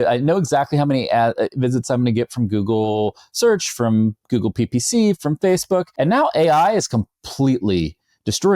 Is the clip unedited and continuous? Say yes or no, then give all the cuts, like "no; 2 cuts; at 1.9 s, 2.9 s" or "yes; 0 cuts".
no; 1 cut; at 5.9 s